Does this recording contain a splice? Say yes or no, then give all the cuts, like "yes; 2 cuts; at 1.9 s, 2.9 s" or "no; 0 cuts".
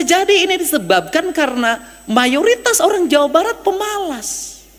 no; 0 cuts